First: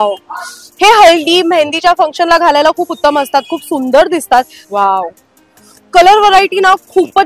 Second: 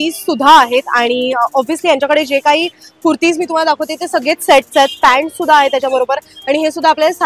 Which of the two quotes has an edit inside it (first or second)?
first